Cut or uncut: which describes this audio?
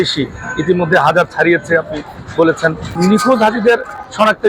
cut